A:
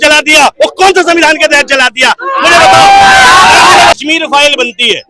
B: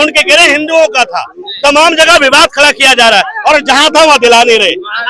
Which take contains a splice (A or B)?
A